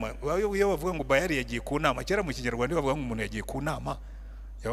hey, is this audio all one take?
yes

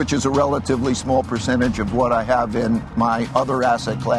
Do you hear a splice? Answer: no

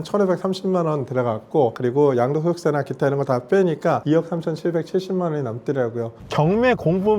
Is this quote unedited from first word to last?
no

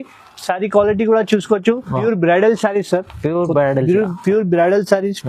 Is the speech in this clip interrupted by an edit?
yes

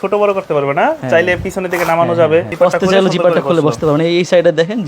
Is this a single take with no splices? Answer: no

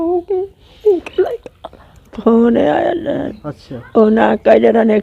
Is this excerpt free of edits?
no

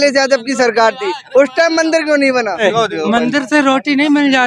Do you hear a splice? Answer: yes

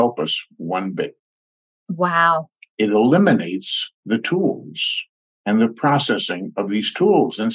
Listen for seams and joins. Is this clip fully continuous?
yes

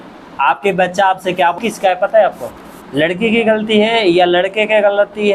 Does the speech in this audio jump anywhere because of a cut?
yes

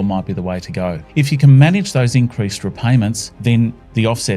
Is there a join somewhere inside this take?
yes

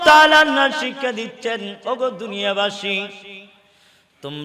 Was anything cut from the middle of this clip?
no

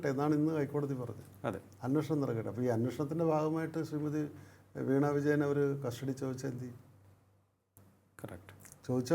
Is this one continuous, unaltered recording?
yes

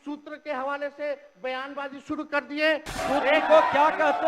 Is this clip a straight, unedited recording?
no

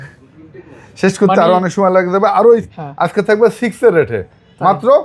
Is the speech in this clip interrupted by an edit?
yes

